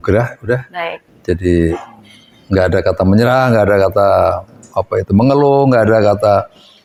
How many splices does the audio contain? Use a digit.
0